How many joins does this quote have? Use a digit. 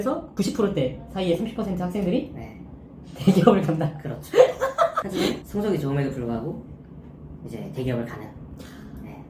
0